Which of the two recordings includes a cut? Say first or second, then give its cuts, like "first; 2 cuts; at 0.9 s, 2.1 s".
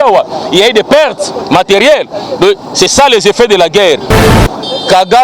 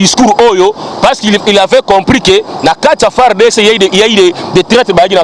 first; 1 cut; at 4.2 s